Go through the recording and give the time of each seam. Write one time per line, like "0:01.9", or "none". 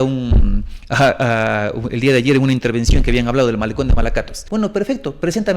0:04.4